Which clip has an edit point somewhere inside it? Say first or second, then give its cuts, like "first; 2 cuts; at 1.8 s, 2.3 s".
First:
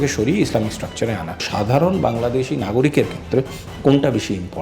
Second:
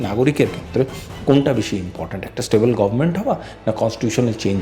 first; 1 cut; at 1.5 s